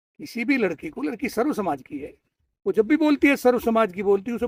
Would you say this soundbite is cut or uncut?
uncut